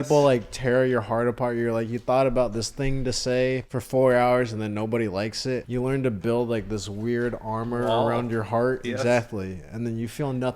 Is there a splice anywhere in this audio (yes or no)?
yes